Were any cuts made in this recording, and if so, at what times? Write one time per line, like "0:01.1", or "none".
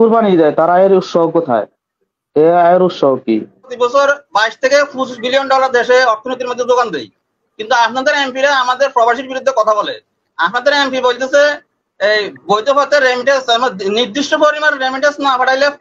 0:03.7